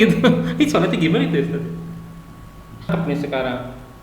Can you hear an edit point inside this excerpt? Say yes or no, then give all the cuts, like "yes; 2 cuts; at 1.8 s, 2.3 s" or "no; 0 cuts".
yes; 1 cut; at 2.9 s